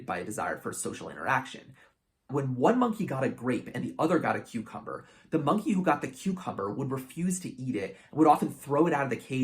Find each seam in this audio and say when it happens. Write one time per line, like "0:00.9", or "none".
0:02.3